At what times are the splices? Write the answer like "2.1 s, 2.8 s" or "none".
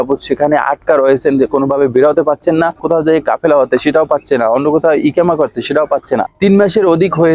2.8 s, 6.3 s